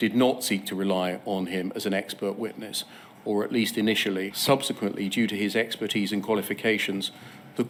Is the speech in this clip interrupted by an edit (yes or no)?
no